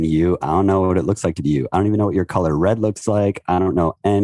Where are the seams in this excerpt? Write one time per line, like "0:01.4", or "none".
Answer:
none